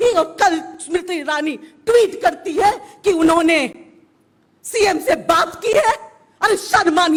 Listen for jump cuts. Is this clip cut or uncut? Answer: uncut